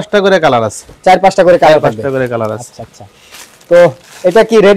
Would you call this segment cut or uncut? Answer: uncut